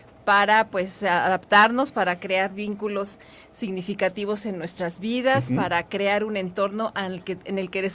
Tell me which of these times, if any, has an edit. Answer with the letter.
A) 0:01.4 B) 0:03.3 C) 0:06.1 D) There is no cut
D